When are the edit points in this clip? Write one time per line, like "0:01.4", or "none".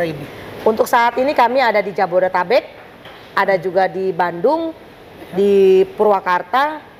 none